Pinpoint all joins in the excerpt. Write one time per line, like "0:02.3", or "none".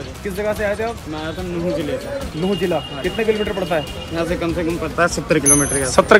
none

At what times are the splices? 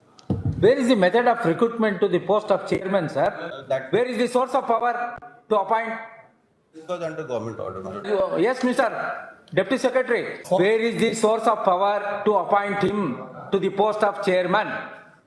0:03.5
0:08.1
0:10.4

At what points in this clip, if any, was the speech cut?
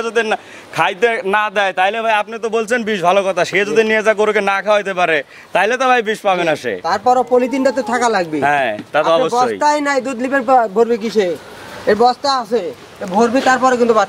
none

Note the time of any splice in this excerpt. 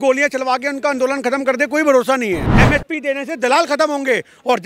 0:02.5

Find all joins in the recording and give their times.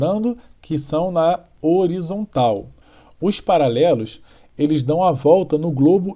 0:02.7

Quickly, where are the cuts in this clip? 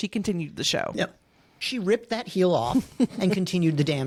none

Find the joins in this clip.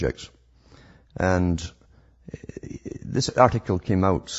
0:02.8

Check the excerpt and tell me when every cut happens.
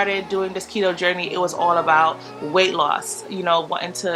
none

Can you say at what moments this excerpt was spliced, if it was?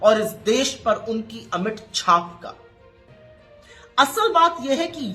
0:02.6
0:03.9

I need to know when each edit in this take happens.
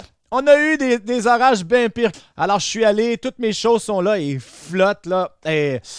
0:02.1

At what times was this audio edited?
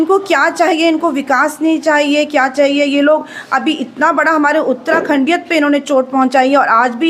none

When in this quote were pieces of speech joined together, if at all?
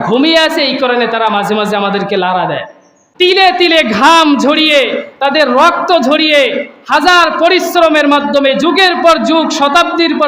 0:03.0

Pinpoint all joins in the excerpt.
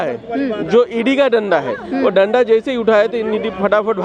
none

